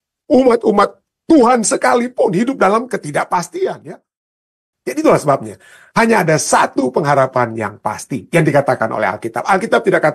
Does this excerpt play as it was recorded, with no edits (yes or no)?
no